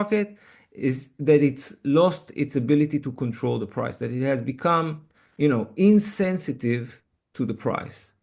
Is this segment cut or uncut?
uncut